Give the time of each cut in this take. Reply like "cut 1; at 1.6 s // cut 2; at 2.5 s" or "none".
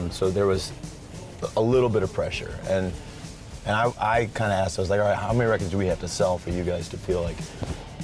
cut 1; at 5.2 s